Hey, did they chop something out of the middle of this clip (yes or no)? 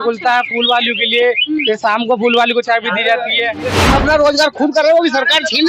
yes